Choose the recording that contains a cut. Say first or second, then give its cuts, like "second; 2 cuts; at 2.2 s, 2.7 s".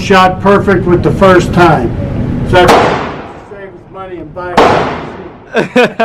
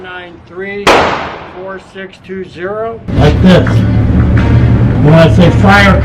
second; 1 cut; at 3.1 s